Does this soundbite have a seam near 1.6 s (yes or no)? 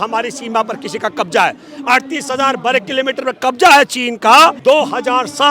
no